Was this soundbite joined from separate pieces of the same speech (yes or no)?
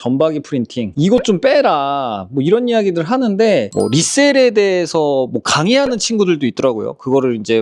yes